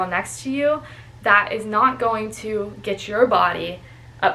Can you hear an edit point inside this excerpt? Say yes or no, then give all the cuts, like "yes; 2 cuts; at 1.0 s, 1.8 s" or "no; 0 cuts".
no; 0 cuts